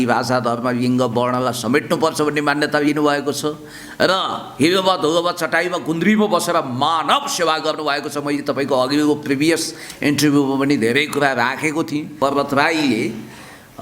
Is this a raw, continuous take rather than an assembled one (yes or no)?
no